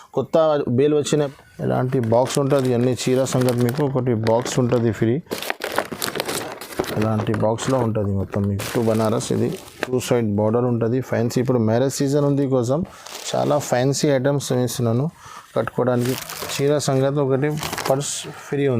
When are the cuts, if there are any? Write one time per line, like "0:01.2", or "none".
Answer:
0:01.3
0:08.6
0:16.2